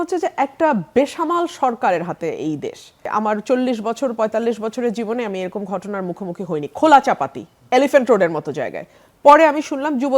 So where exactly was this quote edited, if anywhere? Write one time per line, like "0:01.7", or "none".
0:03.1